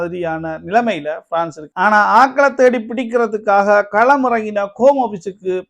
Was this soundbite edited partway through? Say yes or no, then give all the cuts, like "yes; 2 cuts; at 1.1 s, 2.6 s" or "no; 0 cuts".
yes; 1 cut; at 1.6 s